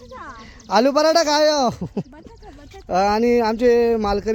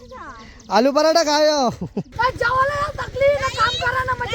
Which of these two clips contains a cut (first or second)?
second